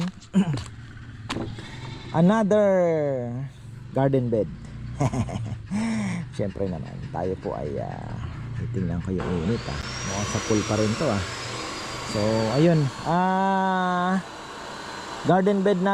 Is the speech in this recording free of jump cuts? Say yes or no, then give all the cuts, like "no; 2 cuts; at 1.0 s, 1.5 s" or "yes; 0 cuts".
yes; 0 cuts